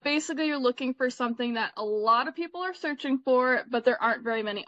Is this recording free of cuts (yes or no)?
yes